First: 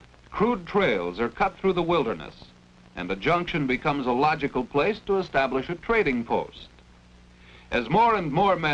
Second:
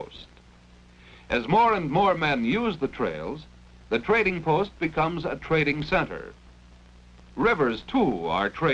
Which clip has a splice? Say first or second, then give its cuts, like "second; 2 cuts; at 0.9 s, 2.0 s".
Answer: first; 1 cut; at 3.6 s